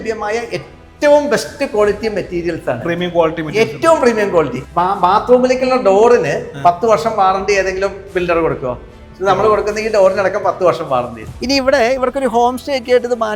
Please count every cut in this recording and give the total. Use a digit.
2